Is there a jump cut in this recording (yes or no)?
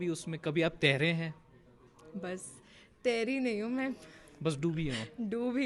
no